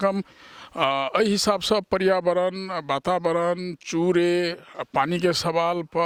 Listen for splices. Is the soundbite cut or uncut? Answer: uncut